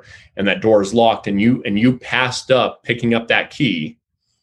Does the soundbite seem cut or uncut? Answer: uncut